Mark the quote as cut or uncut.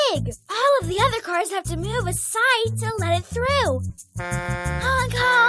cut